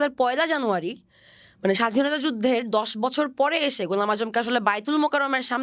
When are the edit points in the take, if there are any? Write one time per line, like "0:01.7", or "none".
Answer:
none